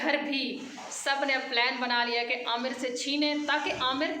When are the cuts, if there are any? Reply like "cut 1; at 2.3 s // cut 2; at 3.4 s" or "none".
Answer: none